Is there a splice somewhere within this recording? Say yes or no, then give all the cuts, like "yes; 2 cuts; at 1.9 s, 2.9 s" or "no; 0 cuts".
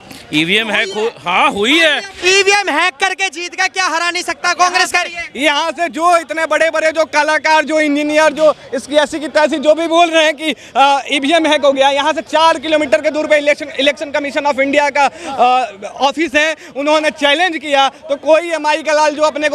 yes; 1 cut; at 2.1 s